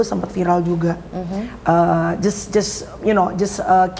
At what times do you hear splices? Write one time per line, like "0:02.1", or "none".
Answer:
none